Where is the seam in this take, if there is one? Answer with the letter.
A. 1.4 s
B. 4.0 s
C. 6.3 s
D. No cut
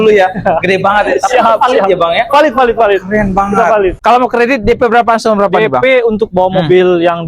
B